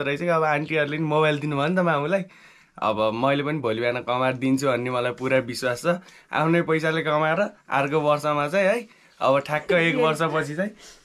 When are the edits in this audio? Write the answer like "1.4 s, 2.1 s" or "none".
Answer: none

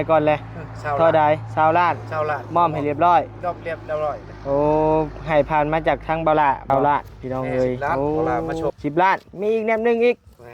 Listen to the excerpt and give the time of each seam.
6.7 s, 8.0 s, 8.7 s

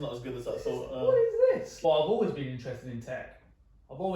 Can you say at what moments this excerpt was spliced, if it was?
1.7 s

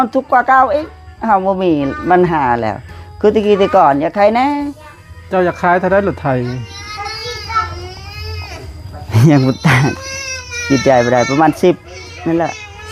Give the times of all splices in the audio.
none

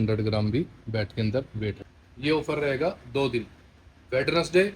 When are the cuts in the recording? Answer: 1.8 s

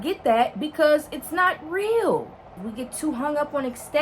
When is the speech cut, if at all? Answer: 2.4 s

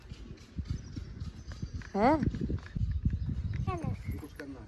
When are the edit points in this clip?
3.7 s

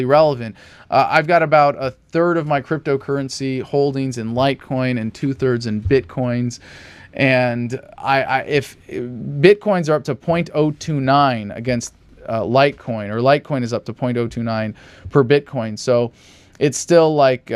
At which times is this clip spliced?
7.4 s

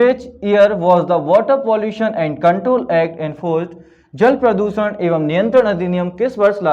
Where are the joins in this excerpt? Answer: none

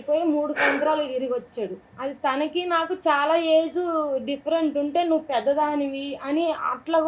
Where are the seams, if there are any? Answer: 1.9 s

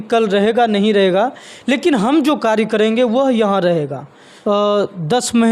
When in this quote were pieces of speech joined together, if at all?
4.2 s

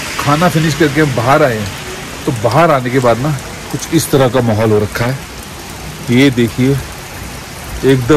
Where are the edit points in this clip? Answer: none

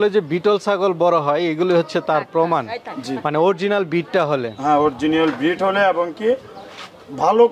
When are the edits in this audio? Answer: none

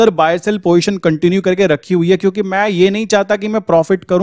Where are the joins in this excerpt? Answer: none

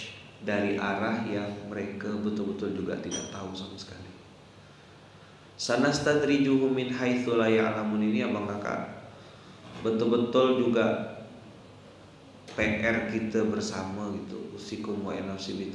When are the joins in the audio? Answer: none

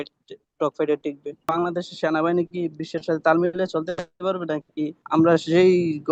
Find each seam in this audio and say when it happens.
1.5 s, 5.0 s

